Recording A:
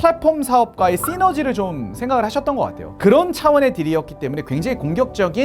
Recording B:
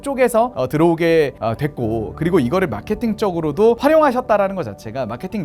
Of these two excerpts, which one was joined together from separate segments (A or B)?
A